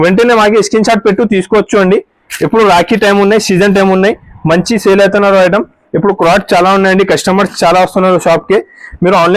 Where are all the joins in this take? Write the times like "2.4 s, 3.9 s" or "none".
none